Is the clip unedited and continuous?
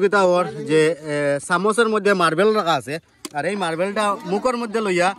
yes; 0 cuts

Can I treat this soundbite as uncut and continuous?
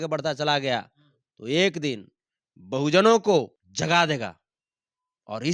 no; 1 cut; at 3.6 s

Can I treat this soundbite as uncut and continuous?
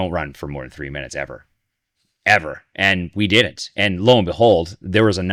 yes; 0 cuts

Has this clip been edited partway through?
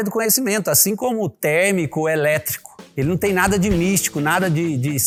no; 0 cuts

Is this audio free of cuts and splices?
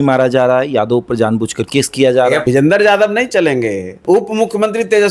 no; 2 cuts; at 2.4 s, 3.9 s

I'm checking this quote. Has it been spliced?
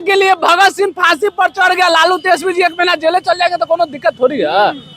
no; 0 cuts

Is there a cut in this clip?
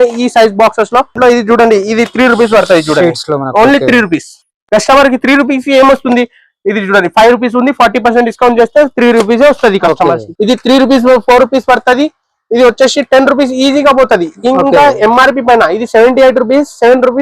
yes; 2 cuts; at 1.2 s, 10.2 s

